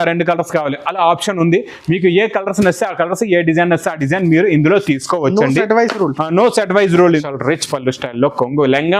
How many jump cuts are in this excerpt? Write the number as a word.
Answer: one